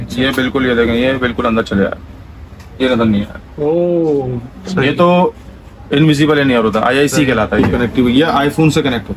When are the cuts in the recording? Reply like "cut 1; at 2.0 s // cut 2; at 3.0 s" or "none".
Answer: cut 1; at 7.6 s